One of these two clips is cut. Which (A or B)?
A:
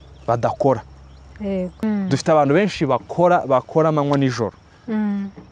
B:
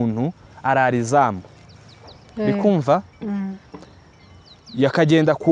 A